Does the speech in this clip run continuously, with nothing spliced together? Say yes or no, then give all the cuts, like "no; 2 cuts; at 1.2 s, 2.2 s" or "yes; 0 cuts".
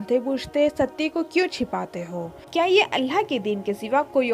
no; 1 cut; at 2.4 s